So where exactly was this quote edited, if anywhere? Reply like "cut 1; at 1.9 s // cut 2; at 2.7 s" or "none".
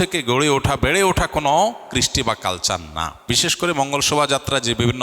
cut 1; at 3.2 s